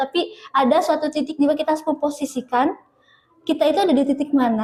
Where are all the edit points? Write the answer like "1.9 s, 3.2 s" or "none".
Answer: none